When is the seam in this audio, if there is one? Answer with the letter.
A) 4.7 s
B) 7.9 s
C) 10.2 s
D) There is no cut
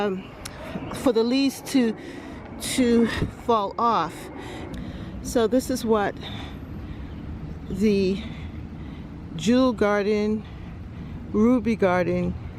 A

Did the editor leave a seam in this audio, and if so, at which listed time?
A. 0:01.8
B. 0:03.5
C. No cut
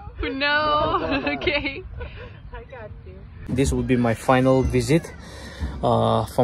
B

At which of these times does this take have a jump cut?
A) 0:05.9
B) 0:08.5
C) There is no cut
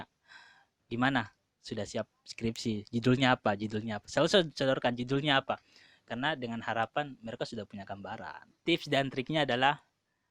B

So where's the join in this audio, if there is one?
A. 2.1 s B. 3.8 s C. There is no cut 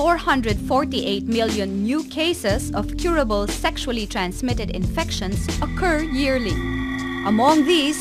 B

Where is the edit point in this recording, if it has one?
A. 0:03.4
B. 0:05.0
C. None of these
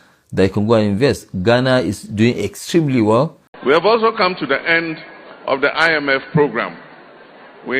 A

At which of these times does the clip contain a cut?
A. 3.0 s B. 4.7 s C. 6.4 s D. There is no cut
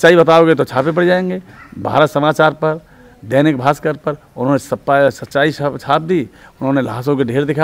D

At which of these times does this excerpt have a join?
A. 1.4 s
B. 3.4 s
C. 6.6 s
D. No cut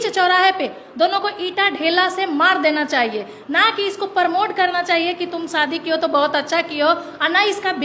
D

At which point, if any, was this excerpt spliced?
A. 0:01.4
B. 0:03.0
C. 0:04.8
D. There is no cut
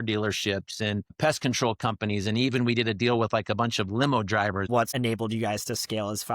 C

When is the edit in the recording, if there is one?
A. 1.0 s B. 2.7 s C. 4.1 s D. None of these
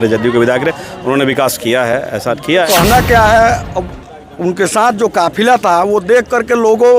B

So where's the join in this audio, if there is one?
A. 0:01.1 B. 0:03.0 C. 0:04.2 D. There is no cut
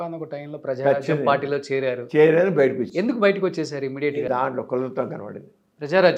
C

